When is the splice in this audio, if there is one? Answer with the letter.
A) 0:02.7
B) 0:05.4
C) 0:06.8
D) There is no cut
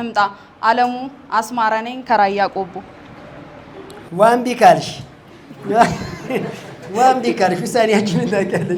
D